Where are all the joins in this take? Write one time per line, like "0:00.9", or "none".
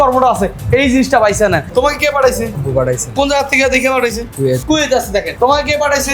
0:01.7
0:02.6
0:04.3